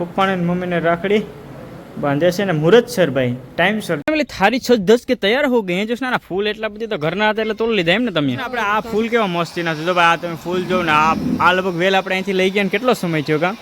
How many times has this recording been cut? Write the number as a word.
two